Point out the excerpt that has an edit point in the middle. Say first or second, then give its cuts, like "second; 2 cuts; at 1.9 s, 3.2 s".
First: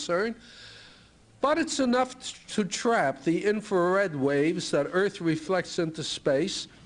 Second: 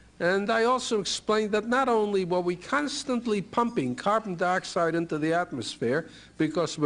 first; 1 cut; at 1.3 s